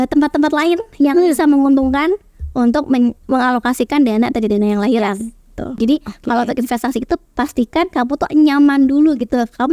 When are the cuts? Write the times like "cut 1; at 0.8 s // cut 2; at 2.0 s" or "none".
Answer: cut 1; at 5.8 s